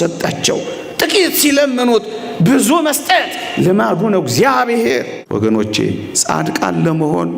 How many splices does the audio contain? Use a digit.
1